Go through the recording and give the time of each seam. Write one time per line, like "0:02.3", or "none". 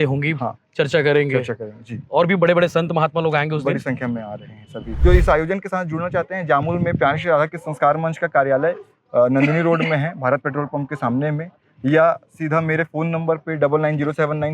0:04.9